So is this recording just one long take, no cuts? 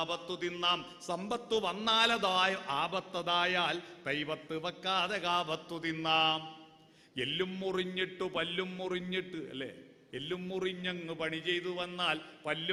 yes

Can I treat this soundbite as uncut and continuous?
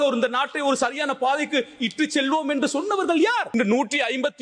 no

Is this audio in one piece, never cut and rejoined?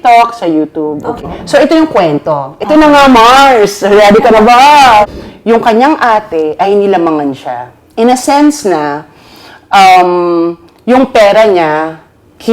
no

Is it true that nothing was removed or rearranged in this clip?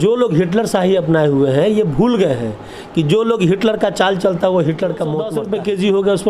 no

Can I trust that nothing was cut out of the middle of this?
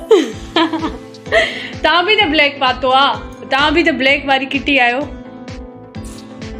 yes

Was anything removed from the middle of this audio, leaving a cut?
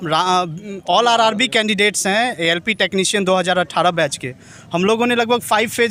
no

